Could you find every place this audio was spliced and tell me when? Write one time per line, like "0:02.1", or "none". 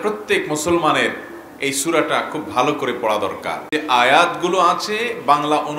0:03.7